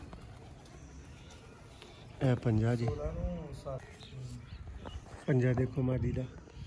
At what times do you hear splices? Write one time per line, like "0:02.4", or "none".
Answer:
0:03.8